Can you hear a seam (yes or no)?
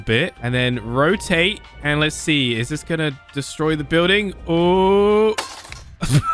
no